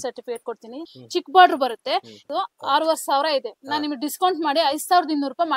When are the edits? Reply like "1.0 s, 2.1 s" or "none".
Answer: 1.0 s